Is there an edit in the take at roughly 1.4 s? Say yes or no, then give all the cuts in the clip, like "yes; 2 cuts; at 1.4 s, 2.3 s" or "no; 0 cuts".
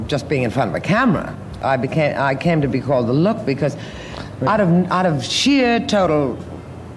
yes; 1 cut; at 1.4 s